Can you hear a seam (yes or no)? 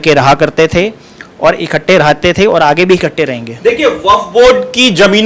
no